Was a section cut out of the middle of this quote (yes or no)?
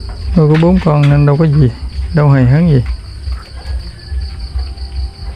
no